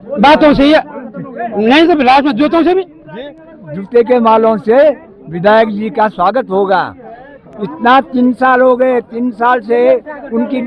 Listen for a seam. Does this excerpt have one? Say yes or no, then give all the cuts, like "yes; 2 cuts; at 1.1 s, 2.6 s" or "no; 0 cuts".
no; 0 cuts